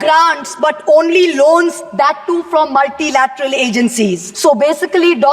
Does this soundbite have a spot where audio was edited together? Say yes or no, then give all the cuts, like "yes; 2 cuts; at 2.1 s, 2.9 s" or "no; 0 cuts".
yes; 1 cut; at 4.3 s